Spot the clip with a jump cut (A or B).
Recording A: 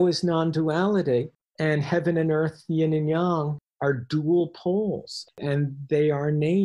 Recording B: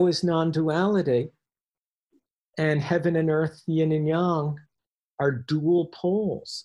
A